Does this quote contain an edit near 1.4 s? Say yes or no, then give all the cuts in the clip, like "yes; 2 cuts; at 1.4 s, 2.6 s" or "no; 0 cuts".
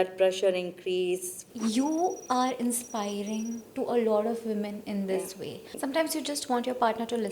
yes; 2 cuts; at 1.4 s, 5.7 s